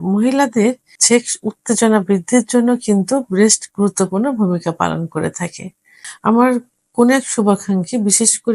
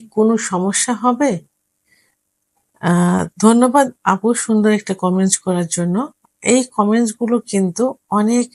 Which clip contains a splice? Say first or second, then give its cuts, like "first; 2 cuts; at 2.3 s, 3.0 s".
first; 2 cuts; at 0.9 s, 6.0 s